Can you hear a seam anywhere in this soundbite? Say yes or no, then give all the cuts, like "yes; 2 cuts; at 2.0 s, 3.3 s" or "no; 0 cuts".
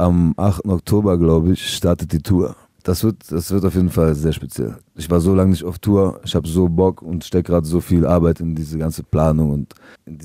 no; 0 cuts